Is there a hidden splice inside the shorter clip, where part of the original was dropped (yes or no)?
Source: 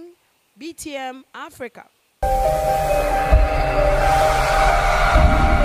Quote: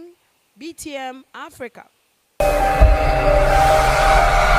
yes